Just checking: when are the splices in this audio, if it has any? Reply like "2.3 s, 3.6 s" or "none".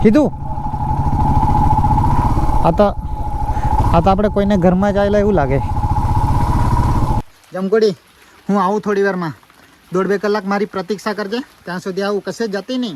7.2 s

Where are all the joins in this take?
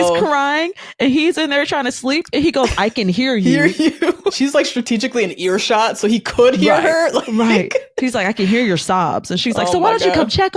4.4 s

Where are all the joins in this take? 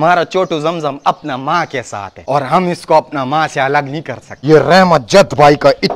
4.3 s

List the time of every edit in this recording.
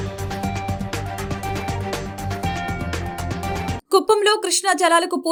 none

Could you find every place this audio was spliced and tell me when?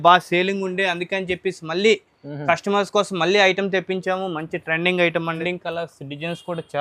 5.4 s

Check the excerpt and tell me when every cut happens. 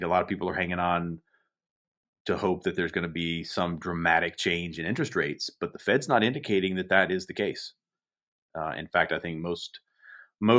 none

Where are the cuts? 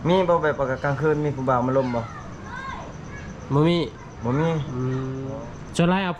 5.2 s

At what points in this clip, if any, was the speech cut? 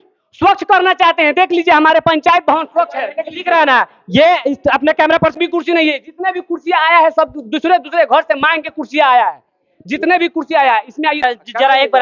5.3 s, 11.2 s

